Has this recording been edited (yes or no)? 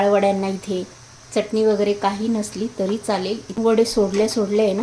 yes